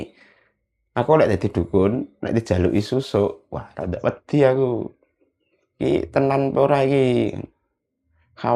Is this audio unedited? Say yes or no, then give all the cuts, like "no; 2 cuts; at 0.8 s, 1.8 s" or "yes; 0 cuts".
yes; 0 cuts